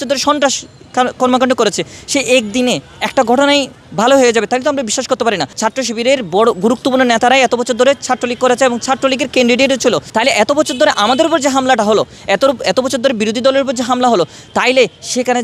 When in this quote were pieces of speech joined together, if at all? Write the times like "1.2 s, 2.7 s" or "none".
5.5 s, 10.0 s